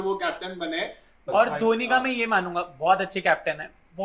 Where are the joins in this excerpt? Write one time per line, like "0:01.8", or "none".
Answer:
0:01.2